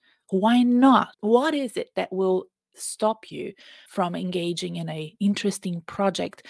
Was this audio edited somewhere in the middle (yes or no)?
yes